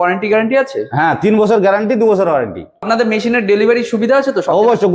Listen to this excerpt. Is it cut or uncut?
cut